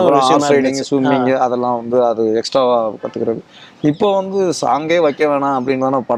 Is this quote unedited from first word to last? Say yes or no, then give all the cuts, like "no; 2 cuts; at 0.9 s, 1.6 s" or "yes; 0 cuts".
yes; 0 cuts